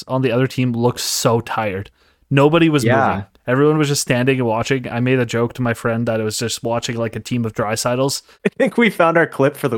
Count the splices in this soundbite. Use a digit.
1